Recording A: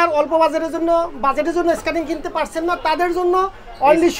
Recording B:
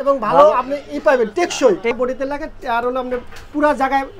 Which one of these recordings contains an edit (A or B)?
B